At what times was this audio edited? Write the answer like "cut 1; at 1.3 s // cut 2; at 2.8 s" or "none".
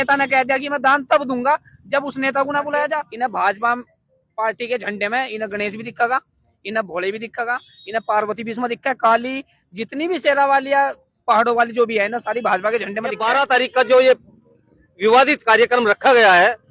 cut 1; at 3.1 s // cut 2; at 13.2 s